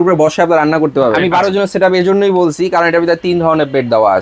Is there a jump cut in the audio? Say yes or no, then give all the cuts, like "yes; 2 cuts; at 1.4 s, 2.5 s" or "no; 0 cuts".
yes; 1 cut; at 1.2 s